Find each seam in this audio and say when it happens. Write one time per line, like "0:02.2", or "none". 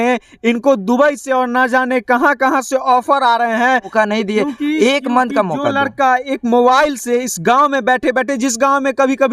0:03.9